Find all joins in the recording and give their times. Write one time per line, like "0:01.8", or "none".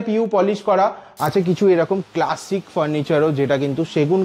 0:01.0